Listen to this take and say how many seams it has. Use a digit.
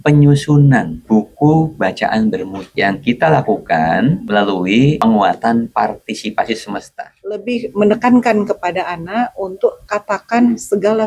2